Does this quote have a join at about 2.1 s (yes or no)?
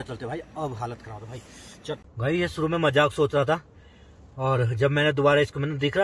yes